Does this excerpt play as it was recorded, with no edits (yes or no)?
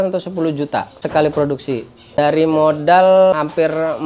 no